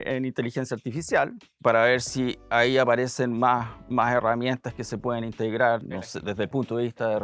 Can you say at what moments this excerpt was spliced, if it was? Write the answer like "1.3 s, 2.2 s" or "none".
1.4 s, 6.0 s